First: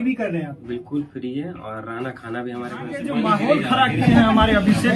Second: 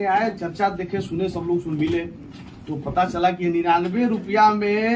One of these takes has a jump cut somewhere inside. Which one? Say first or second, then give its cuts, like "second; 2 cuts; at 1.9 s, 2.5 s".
first; 1 cut; at 3.0 s